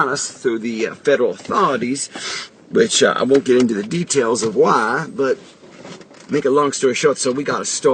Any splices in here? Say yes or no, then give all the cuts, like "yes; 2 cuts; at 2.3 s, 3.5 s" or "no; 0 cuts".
no; 0 cuts